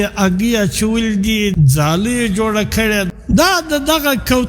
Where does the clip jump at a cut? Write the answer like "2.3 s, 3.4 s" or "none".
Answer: 1.5 s, 3.2 s